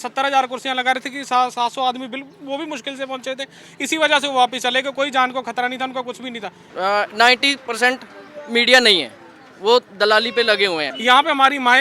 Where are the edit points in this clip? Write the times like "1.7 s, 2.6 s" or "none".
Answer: 6.6 s, 10.9 s